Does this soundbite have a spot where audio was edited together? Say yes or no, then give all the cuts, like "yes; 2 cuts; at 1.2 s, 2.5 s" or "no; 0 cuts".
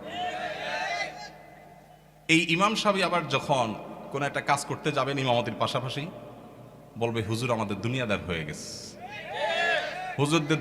no; 0 cuts